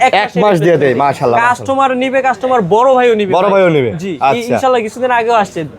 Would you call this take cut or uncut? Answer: uncut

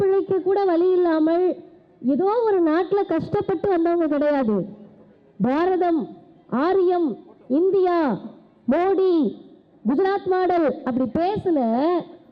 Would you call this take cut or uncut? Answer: uncut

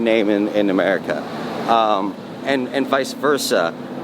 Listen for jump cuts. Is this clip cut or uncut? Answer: uncut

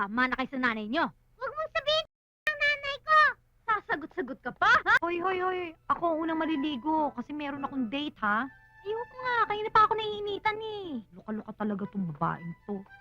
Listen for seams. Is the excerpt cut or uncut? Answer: cut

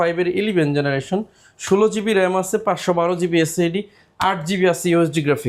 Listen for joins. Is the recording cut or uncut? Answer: uncut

